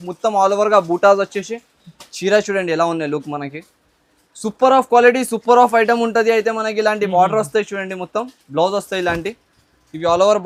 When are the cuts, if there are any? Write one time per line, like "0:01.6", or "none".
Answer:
none